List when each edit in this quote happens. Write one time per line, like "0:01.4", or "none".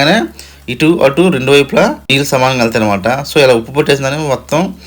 none